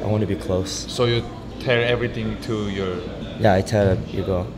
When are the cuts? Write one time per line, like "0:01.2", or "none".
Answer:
0:01.4
0:03.2